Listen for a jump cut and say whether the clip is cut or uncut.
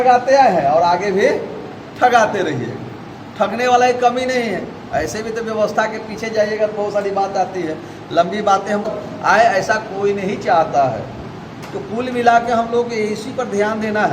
cut